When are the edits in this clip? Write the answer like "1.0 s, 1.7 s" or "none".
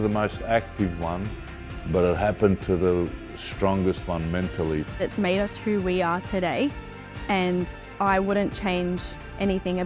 none